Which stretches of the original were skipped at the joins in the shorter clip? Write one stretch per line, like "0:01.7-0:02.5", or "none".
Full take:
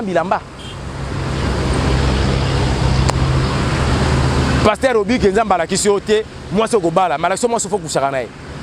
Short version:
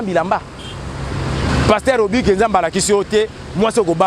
0:01.5-0:04.4